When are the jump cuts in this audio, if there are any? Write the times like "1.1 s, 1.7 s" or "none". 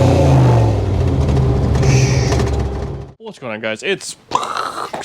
2.8 s